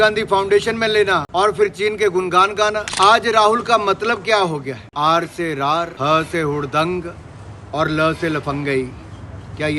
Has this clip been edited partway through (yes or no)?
yes